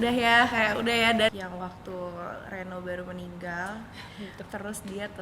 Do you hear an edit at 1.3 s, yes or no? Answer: yes